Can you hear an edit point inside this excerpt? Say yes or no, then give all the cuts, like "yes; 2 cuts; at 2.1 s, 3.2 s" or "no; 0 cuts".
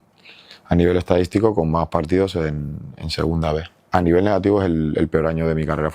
yes; 1 cut; at 3.7 s